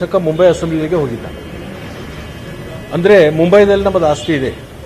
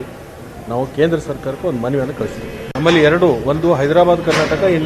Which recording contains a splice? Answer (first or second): second